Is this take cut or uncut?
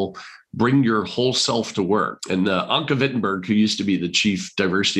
cut